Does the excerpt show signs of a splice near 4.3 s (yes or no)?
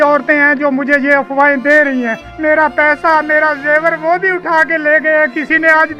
no